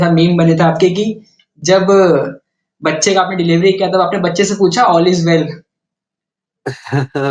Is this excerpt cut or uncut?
uncut